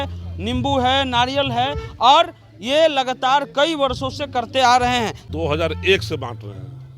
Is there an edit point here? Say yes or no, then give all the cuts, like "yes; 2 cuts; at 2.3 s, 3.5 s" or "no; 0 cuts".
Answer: yes; 1 cut; at 5.2 s